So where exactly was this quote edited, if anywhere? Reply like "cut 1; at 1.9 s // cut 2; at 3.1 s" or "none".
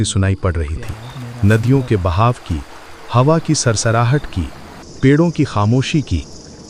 none